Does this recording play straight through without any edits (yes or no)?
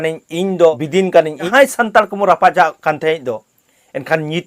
no